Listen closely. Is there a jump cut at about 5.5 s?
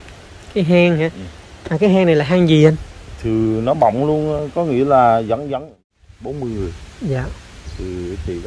yes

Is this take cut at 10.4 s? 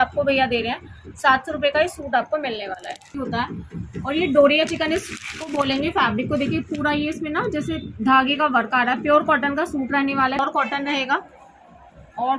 yes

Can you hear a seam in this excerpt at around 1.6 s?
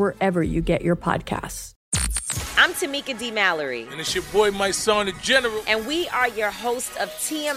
yes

